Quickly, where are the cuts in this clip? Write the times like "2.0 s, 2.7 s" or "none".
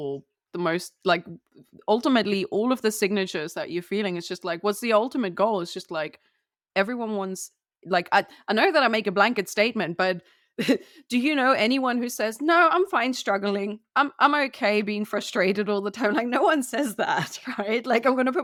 none